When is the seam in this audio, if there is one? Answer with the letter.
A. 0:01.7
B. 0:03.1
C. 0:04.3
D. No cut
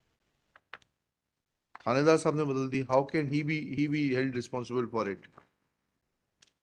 D